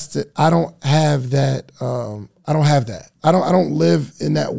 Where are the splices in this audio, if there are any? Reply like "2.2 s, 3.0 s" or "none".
3.1 s